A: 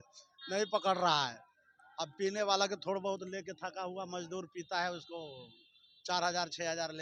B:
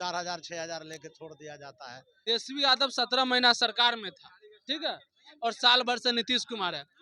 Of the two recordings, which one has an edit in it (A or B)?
B